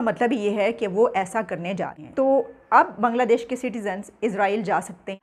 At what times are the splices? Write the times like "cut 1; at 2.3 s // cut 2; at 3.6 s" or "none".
cut 1; at 2.0 s